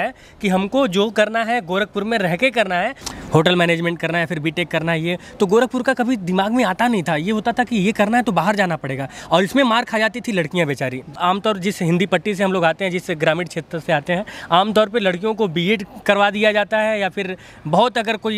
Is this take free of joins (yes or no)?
no